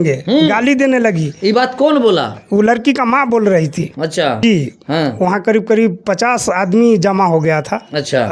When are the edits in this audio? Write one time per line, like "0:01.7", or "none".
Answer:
0:04.4